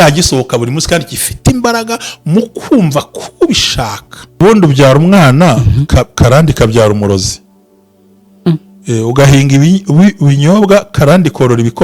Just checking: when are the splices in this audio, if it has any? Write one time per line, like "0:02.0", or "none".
0:04.4